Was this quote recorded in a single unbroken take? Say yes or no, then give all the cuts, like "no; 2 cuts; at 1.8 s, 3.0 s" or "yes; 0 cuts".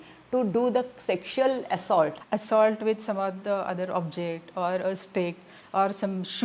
no; 1 cut; at 2.2 s